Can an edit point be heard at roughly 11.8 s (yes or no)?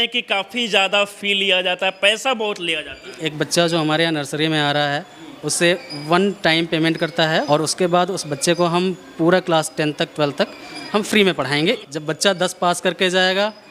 yes